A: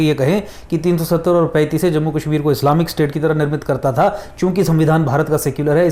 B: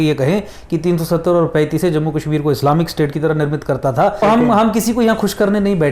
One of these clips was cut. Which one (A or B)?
B